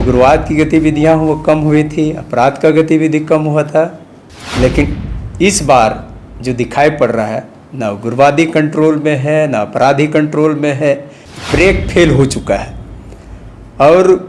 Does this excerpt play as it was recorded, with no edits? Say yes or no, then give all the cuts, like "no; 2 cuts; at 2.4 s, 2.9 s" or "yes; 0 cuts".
yes; 0 cuts